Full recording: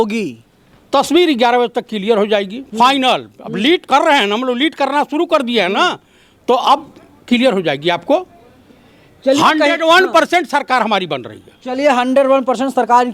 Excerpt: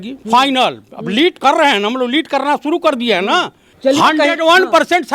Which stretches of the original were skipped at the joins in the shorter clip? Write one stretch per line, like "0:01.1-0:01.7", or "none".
0:06.1-0:09.0